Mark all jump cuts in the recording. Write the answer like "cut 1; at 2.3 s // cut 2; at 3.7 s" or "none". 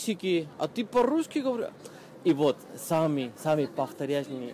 none